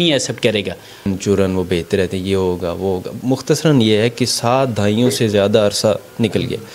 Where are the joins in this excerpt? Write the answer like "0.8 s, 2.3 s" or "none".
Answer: 1.0 s